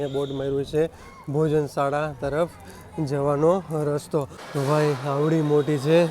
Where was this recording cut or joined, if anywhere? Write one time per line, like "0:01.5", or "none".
0:04.4